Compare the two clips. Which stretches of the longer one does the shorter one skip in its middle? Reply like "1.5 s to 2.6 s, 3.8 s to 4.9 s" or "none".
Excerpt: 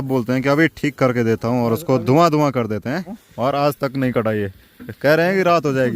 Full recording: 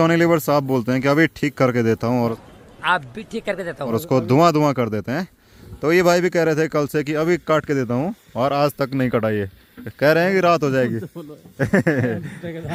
2.3 s to 4.0 s, 5.4 s to 8.2 s